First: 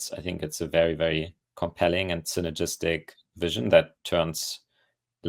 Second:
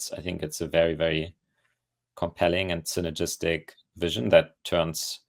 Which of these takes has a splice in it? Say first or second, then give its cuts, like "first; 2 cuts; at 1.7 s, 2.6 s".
first; 1 cut; at 1.4 s